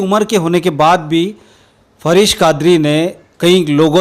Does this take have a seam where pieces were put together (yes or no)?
no